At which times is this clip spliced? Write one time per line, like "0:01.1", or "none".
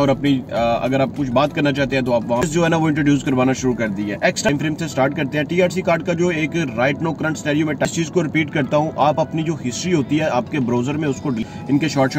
0:02.5
0:04.5
0:07.9
0:11.4